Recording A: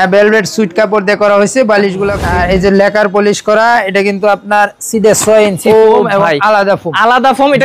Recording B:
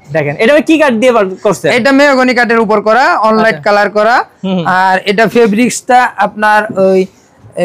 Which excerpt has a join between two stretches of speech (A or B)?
A